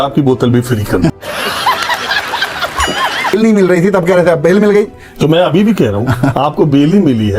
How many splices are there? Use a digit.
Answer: 2